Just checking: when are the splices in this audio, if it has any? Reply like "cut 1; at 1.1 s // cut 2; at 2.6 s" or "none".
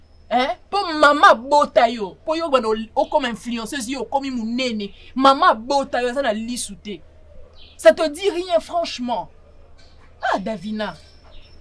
none